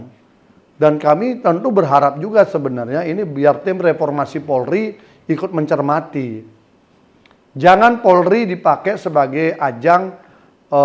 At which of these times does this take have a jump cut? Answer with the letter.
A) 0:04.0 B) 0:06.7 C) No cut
C